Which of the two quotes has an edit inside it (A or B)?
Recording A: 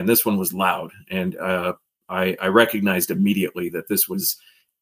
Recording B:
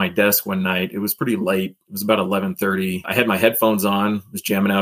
B